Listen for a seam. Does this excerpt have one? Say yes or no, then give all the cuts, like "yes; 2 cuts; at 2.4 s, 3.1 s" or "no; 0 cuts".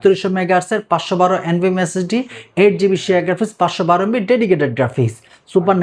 no; 0 cuts